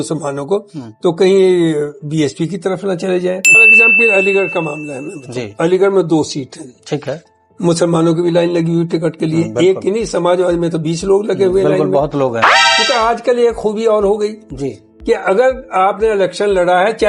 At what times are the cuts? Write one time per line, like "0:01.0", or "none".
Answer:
0:03.6
0:12.5

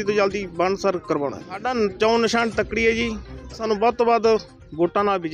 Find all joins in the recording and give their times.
0:01.6
0:03.6

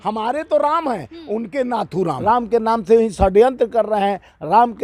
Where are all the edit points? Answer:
0:02.2

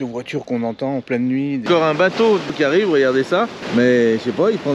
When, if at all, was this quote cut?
0:01.6
0:02.6
0:03.6

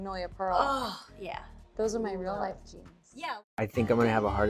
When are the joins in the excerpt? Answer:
0:03.4

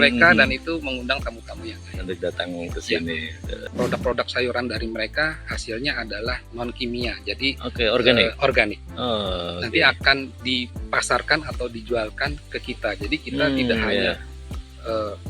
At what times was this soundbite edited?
0:03.6

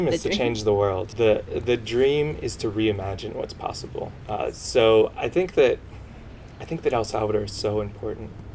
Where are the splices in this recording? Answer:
0:01.1
0:04.2

